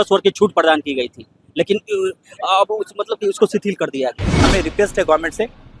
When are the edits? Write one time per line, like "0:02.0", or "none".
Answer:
0:04.3